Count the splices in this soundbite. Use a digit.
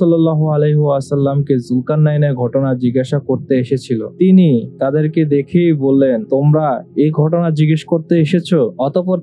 0